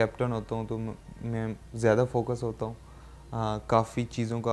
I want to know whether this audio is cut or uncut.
uncut